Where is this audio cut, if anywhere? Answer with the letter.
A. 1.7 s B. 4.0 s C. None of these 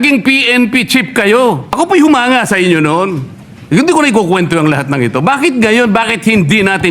A